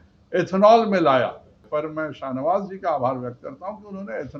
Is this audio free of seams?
no; 1 cut; at 1.5 s

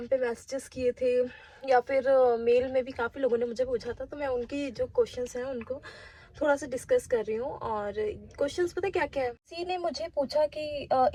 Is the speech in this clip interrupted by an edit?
no; 0 cuts

